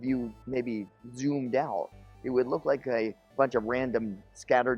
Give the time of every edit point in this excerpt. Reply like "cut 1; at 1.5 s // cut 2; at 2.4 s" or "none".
cut 1; at 3.2 s

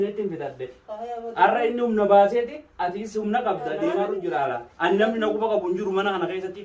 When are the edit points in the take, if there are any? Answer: cut 1; at 4.2 s

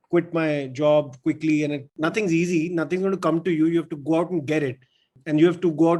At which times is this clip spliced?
cut 1; at 1.9 s

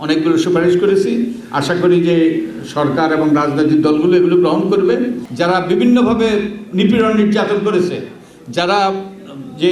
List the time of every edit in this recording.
cut 1; at 5.2 s

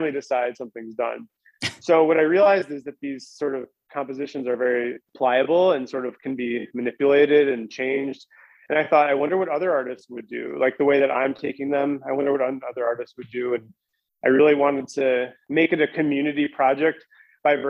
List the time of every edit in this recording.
cut 1; at 5.0 s // cut 2; at 15.4 s

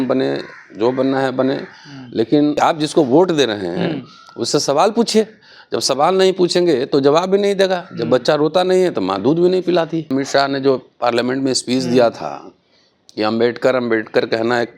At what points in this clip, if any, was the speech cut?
cut 1; at 2.6 s // cut 2; at 10.1 s

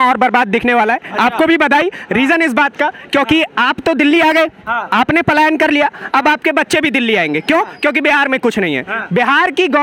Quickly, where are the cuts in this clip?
none

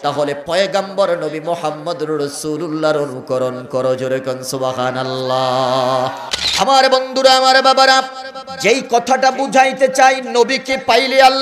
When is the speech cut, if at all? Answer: cut 1; at 6.3 s

